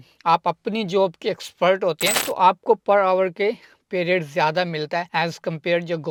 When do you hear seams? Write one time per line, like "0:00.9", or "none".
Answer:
none